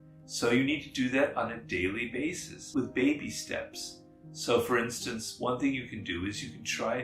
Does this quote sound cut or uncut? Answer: cut